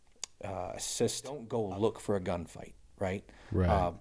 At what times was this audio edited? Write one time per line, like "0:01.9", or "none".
0:01.5